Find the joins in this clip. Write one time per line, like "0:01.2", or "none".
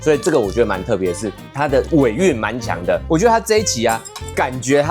0:03.0

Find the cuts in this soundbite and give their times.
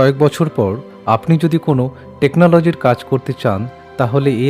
none

